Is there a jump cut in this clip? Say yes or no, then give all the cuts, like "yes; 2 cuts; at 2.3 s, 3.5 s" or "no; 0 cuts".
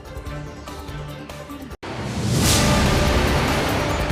no; 0 cuts